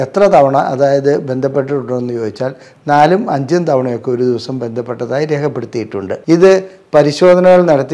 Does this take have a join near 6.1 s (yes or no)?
yes